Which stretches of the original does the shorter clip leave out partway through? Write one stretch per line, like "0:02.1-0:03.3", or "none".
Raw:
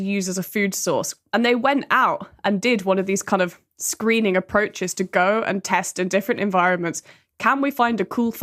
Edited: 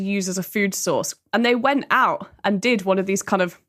none